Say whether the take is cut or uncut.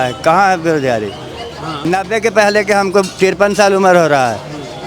cut